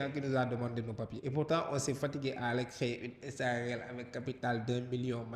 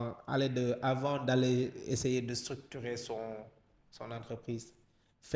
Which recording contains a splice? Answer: first; 1 cut; at 1.2 s

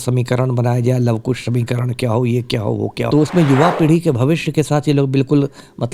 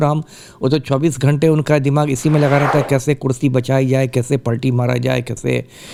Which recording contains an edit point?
first; 1 cut; at 3.1 s

